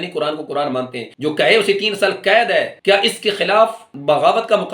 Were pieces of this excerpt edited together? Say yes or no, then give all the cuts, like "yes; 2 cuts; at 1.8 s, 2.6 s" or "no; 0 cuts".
yes; 2 cuts; at 1.0 s, 2.7 s